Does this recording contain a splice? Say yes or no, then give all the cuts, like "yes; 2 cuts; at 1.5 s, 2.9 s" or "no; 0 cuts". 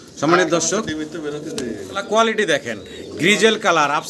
yes; 1 cut; at 1.9 s